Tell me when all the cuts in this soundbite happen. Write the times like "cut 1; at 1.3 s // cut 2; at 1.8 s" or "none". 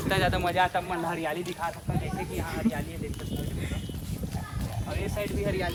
none